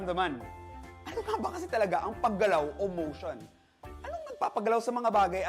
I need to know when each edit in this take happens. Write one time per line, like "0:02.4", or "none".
none